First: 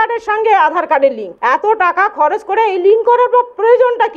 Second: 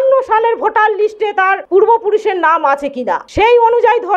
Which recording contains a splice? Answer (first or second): first